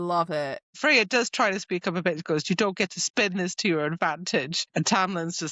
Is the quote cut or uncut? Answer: cut